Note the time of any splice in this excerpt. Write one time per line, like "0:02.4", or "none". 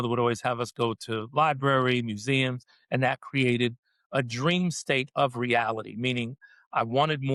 none